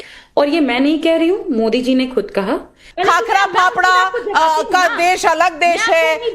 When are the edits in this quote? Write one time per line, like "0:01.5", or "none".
0:02.9